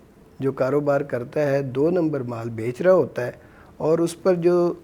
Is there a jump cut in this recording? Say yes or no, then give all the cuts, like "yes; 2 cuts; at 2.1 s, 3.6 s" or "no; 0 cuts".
no; 0 cuts